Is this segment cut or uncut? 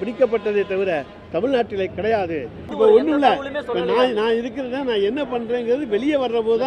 cut